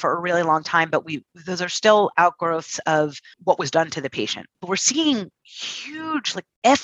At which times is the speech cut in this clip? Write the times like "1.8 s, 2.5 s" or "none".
3.4 s, 4.6 s

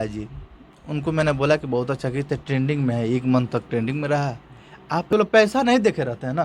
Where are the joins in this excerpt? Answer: 5.1 s

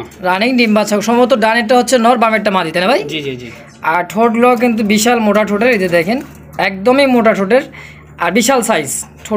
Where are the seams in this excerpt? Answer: none

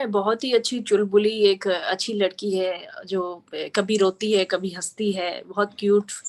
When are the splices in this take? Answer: none

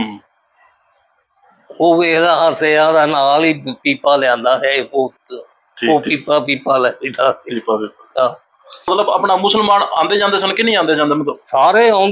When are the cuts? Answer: 8.9 s

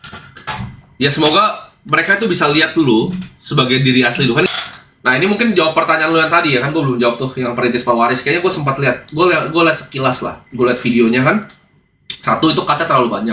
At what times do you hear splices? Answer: 4.5 s

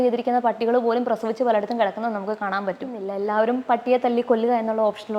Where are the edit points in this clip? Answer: 3.1 s

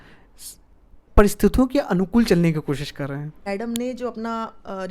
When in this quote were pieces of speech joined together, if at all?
3.5 s

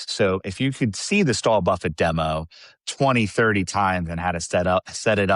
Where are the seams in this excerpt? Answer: none

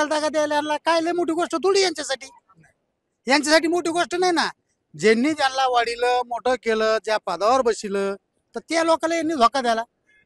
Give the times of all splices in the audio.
none

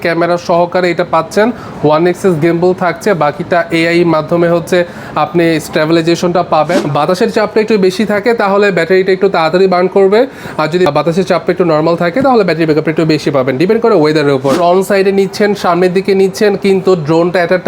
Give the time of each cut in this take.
6.8 s, 14.6 s

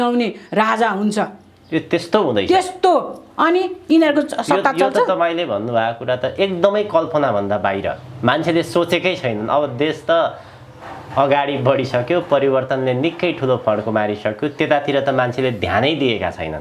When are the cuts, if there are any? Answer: none

